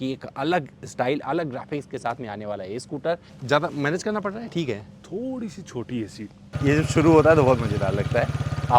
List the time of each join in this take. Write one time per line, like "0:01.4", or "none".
0:03.3
0:06.5